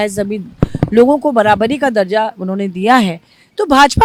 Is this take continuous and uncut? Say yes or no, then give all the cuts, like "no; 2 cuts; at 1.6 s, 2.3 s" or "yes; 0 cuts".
yes; 0 cuts